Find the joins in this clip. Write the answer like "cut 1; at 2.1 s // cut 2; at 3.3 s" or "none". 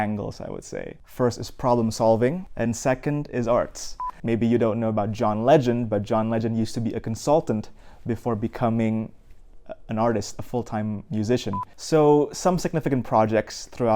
cut 1; at 1.0 s // cut 2; at 2.5 s // cut 3; at 4.1 s // cut 4; at 11.7 s